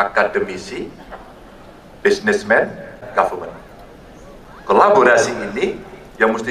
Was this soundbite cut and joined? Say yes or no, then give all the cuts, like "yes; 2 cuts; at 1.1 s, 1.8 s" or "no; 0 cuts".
yes; 1 cut; at 3.0 s